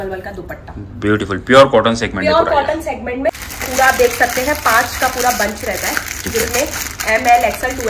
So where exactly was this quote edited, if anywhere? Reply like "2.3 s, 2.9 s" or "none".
3.4 s

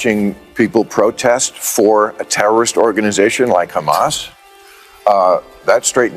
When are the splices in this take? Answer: none

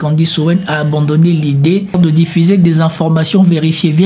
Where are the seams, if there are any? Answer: 1.9 s

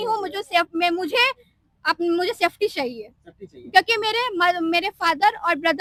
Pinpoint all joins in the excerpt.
none

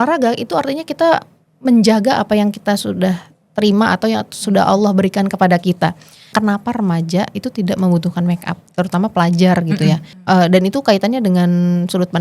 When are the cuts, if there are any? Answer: 6.3 s, 10.1 s

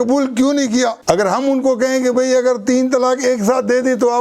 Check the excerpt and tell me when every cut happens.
1.0 s

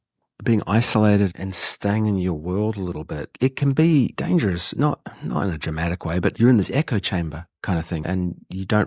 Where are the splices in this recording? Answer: 1.3 s

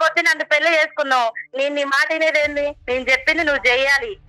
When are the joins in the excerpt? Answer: 1.4 s, 2.8 s

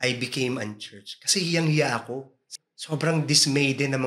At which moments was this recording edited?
2.4 s

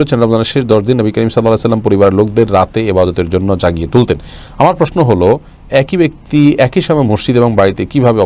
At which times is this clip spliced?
none

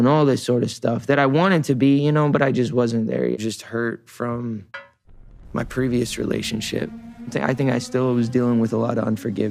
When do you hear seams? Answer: 3.4 s

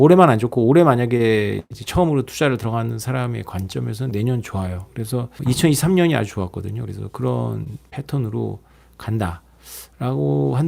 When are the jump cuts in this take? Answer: 5.3 s

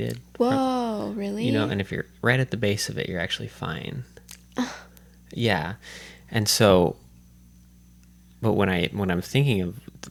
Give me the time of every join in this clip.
none

